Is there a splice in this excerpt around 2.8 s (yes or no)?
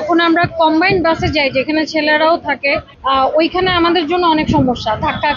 no